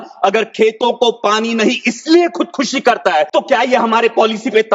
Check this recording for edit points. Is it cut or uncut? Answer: cut